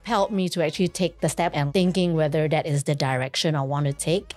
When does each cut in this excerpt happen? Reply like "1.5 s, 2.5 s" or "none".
1.5 s